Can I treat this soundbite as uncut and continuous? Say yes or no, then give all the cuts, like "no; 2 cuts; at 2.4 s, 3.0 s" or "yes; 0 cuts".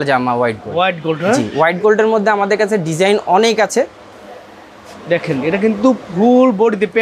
yes; 0 cuts